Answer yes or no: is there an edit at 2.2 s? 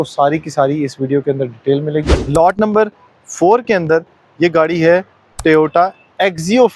yes